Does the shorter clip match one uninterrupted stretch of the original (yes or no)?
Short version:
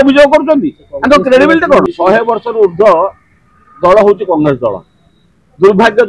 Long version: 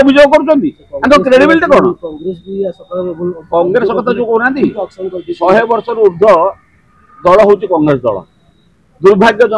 no